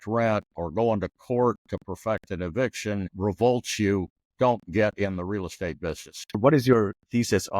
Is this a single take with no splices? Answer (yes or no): no